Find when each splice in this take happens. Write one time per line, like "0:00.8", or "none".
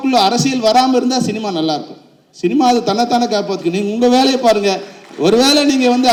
none